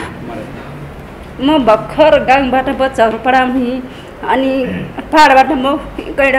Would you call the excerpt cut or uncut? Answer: uncut